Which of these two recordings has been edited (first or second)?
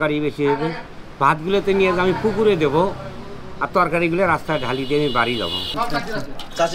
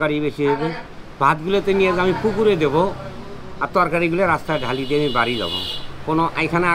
first